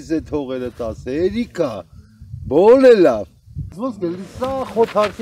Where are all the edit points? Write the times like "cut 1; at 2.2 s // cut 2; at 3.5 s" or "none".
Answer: cut 1; at 3.7 s

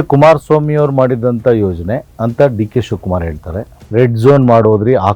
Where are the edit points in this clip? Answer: cut 1; at 2.1 s // cut 2; at 3.8 s

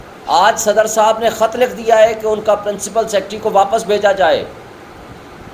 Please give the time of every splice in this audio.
none

